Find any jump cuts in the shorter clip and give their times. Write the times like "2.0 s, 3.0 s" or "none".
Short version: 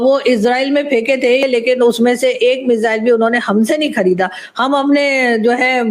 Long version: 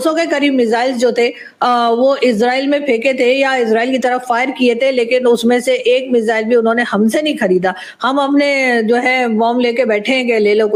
1.4 s